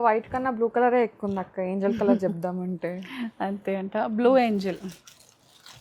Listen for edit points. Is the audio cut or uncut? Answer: uncut